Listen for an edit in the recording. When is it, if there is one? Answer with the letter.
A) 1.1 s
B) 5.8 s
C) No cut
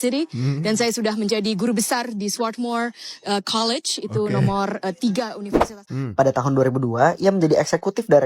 B